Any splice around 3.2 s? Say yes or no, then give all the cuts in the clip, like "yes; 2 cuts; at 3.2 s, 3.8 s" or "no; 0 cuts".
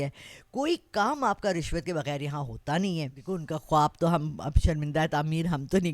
yes; 1 cut; at 3.2 s